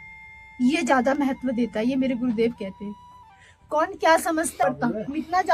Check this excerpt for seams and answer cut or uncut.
cut